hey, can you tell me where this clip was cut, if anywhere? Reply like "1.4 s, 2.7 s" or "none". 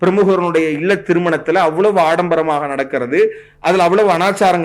none